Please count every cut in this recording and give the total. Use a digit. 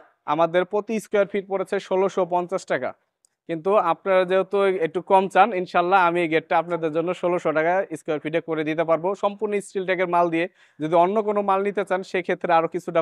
0